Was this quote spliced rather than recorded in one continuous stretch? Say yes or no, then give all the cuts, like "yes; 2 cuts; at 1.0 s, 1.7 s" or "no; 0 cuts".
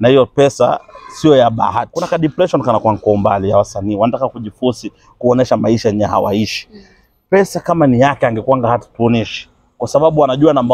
yes; 1 cut; at 1.9 s